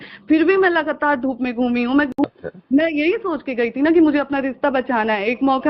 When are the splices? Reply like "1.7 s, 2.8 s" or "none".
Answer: 2.1 s